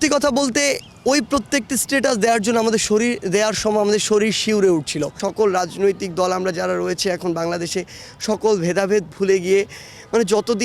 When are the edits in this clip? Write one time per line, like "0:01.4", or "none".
0:05.2